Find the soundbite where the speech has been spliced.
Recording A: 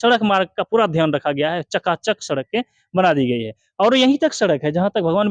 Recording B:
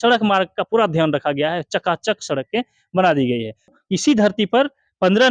B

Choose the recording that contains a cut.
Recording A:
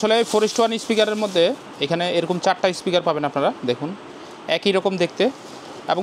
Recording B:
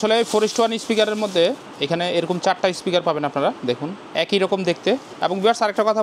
B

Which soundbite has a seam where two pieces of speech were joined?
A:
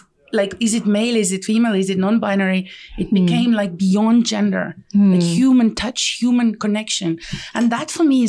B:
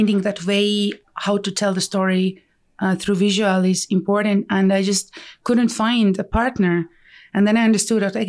B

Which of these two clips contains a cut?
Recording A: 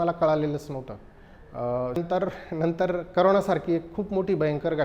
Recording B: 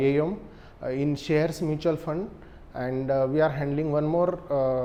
A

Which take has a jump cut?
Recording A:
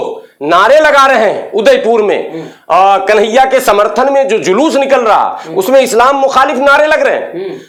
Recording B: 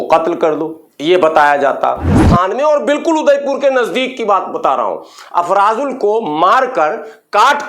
B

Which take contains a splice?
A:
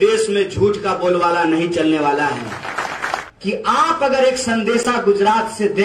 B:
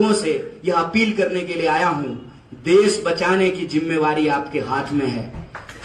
A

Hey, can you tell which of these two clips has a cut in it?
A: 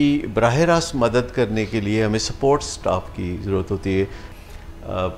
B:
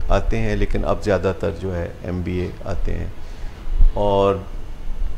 A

